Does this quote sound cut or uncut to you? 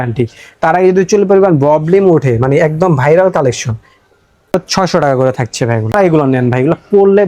cut